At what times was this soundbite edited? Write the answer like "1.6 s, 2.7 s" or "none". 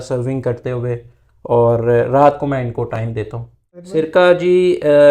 3.9 s